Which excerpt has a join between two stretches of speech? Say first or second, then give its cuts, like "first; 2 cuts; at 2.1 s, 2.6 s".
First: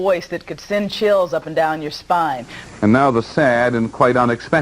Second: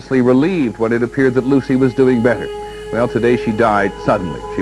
first; 1 cut; at 2.6 s